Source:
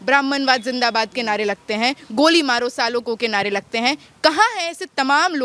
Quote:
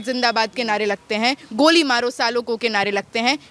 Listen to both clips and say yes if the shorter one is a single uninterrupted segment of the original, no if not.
yes